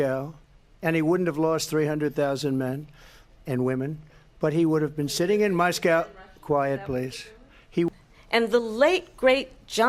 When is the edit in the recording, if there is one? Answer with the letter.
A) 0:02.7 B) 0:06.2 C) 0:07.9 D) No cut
C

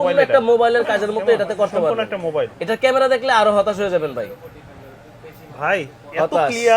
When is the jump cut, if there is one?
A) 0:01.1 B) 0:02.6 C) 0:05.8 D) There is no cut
B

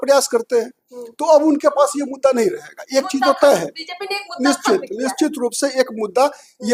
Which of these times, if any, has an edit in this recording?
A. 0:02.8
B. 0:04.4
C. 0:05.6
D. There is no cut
D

